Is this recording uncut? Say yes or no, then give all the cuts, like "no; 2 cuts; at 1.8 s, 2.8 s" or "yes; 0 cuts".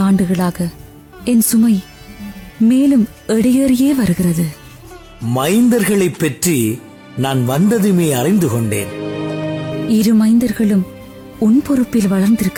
yes; 0 cuts